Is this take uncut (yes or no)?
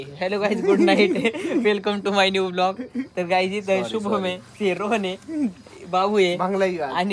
yes